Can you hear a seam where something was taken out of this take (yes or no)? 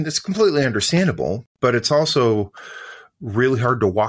yes